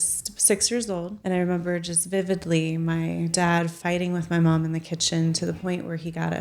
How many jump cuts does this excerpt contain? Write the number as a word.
one